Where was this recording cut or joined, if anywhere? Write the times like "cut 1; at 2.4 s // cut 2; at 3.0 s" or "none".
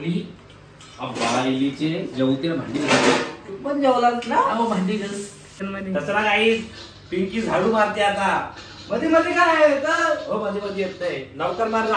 cut 1; at 5.5 s